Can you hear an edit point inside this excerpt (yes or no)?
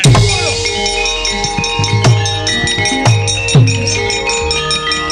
no